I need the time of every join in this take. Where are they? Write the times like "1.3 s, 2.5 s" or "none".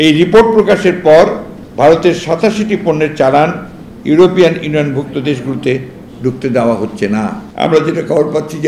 7.4 s